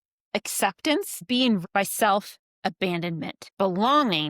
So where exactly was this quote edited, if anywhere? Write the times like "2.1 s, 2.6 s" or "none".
1.6 s, 3.4 s